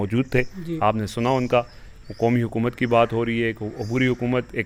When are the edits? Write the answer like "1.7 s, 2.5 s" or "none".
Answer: none